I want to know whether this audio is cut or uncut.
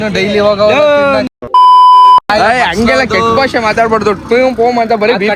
uncut